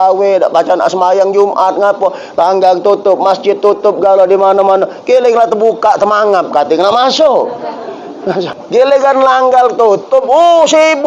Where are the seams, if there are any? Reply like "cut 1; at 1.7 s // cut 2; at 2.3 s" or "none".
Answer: cut 1; at 8.4 s